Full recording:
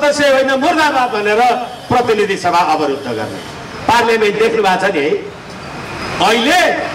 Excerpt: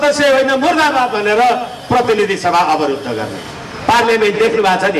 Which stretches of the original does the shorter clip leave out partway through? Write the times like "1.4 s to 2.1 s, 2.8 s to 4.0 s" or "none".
none